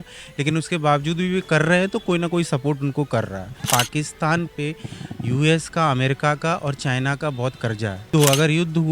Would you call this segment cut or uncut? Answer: cut